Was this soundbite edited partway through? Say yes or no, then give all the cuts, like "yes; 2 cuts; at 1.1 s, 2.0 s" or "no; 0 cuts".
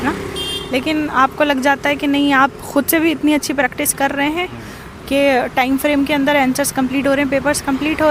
no; 0 cuts